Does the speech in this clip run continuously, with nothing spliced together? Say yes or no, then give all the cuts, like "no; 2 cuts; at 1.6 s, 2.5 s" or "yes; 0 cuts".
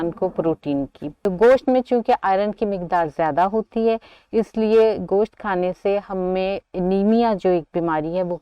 no; 1 cut; at 1.0 s